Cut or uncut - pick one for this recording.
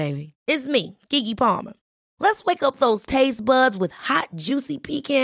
uncut